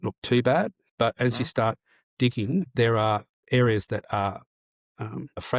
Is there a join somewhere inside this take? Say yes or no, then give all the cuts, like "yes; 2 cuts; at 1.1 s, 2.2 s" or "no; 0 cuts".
no; 0 cuts